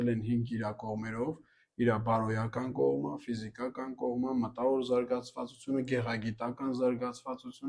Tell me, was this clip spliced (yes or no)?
no